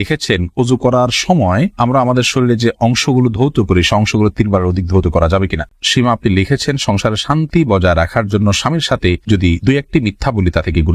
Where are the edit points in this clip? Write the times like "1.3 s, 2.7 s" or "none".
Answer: 5.6 s